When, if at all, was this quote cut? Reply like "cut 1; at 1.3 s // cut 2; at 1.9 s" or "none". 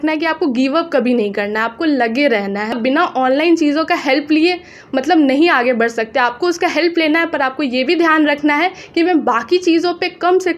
cut 1; at 2.7 s